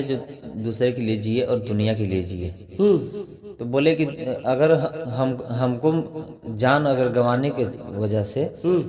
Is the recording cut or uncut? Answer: uncut